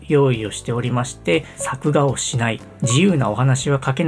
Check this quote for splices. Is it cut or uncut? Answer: cut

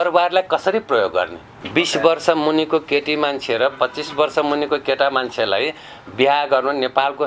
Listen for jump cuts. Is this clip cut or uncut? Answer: cut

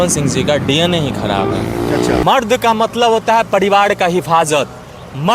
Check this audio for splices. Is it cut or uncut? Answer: cut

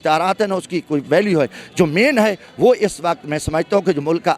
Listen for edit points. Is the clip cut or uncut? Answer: uncut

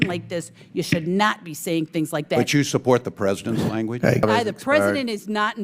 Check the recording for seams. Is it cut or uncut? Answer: cut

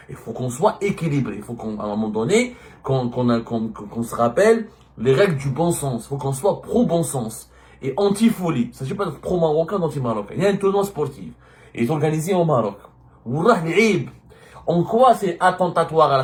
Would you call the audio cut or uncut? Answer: uncut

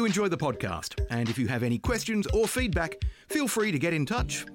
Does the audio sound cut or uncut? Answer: uncut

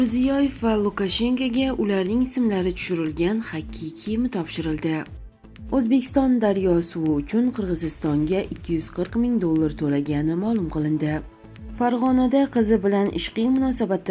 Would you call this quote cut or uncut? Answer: cut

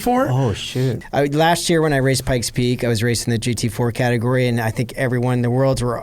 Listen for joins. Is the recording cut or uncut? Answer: cut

